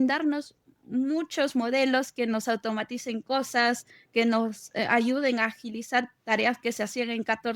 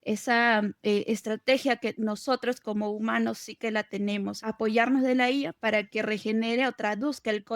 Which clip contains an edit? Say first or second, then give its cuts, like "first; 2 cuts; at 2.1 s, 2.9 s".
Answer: second; 1 cut; at 4.4 s